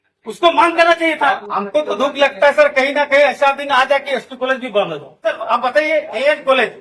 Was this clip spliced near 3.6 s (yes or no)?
no